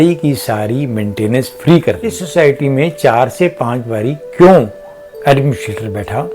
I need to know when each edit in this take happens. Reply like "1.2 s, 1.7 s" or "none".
2.2 s